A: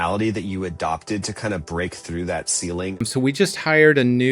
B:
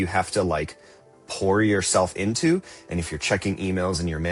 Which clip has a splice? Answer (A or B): A